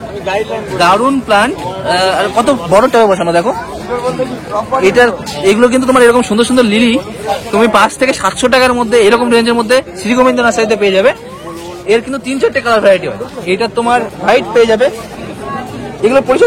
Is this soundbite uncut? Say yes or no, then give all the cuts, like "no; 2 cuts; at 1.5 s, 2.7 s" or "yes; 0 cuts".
yes; 0 cuts